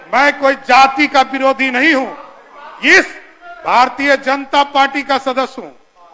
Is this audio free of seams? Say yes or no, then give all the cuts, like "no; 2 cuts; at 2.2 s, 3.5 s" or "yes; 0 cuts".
yes; 0 cuts